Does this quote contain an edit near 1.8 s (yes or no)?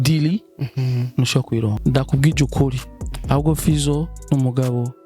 yes